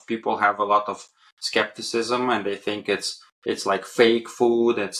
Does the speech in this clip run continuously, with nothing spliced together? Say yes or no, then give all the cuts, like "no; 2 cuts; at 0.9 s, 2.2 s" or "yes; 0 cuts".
yes; 0 cuts